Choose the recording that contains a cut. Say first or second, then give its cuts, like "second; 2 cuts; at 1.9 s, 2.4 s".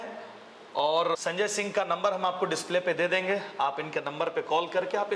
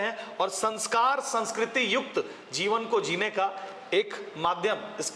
first; 1 cut; at 1.2 s